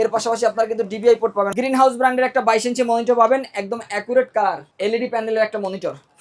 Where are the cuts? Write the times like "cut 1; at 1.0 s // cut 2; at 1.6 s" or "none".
cut 1; at 1.5 s